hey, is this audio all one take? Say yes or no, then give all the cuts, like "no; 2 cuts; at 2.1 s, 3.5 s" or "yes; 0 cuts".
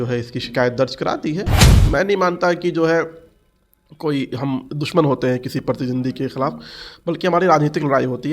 no; 1 cut; at 1.8 s